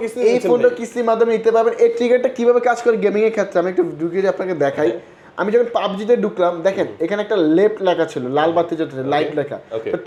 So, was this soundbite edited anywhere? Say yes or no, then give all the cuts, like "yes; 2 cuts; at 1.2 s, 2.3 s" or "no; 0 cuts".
no; 0 cuts